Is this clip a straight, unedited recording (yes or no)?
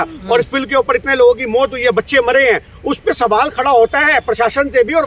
yes